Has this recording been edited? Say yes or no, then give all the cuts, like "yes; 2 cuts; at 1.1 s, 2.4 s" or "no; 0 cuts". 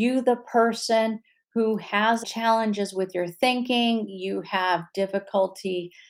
yes; 1 cut; at 2.2 s